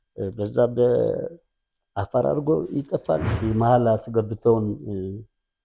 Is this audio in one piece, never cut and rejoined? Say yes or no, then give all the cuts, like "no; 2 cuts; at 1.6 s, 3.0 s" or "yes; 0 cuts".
no; 1 cut; at 3.3 s